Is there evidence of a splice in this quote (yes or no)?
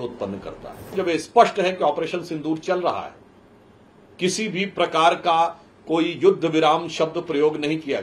yes